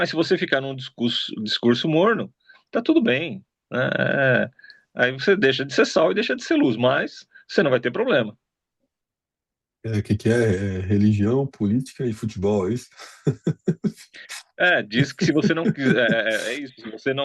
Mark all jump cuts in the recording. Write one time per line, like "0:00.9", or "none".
none